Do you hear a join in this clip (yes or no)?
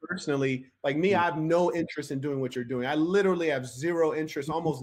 no